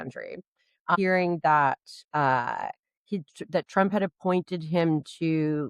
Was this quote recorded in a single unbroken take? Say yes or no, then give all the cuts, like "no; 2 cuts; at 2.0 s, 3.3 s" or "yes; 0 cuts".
no; 1 cut; at 1.0 s